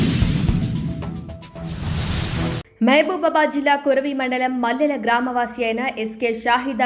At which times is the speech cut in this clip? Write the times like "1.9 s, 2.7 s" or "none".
2.7 s